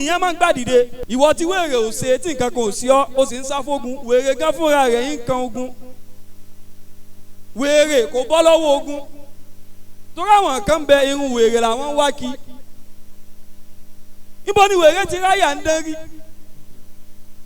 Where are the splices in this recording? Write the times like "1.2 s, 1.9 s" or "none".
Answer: 1.0 s